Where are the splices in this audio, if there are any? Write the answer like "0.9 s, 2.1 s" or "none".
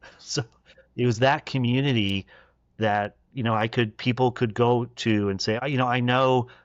5.6 s